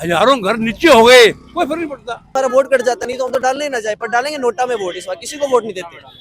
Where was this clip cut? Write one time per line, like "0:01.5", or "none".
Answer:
0:02.3